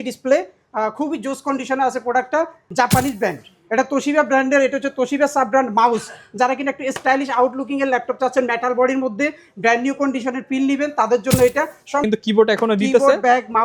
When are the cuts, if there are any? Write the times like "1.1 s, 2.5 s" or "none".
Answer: 2.6 s, 12.1 s